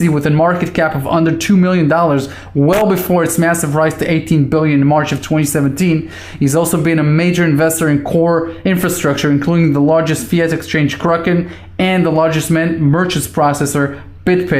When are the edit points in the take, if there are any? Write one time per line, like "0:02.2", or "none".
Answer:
0:11.3